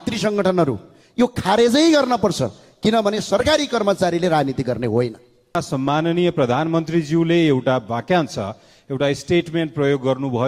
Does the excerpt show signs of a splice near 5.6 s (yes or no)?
yes